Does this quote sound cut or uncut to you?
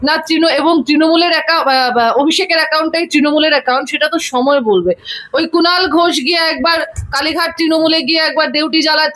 cut